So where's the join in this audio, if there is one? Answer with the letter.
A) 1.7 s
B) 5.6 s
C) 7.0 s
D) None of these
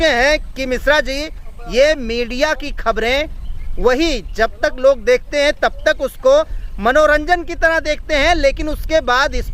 D